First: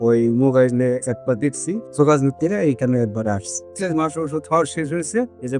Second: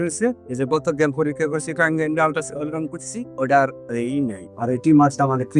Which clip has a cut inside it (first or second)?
first